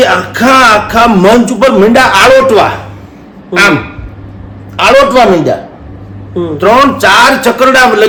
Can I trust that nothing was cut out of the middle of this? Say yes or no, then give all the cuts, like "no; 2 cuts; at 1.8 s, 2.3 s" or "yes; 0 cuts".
yes; 0 cuts